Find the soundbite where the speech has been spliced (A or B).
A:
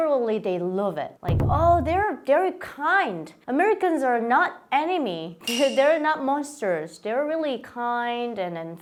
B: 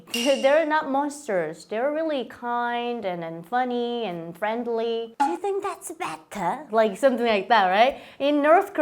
B